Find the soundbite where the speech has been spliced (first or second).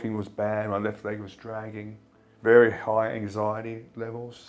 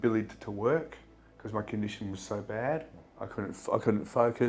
first